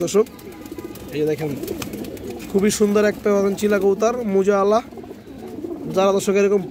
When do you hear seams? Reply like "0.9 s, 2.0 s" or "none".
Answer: none